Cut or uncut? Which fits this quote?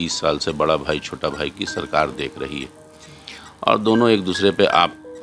uncut